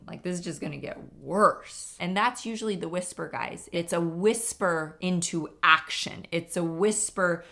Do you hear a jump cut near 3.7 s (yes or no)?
yes